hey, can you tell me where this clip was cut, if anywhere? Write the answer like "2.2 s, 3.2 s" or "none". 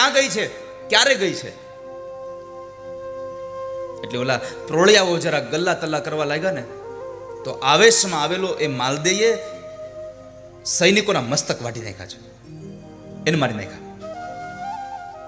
none